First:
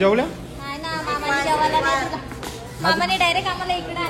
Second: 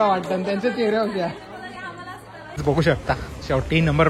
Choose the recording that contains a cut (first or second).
second